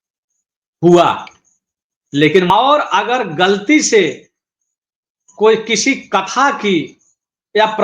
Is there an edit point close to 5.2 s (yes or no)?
no